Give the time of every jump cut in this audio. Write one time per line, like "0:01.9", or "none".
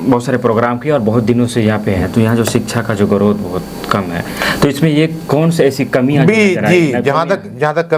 none